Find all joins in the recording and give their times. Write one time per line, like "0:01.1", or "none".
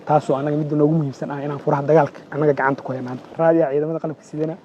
0:03.3